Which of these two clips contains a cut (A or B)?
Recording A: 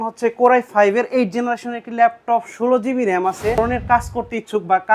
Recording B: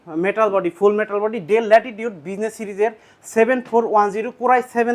A